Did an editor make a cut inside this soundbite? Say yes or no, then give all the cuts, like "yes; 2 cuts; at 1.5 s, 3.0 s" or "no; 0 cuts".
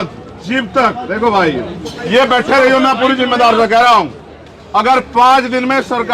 yes; 1 cut; at 1.9 s